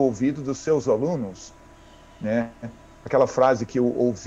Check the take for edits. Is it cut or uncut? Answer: uncut